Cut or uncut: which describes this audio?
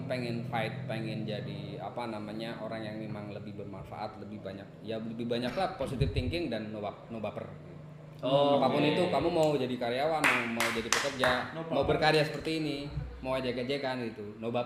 uncut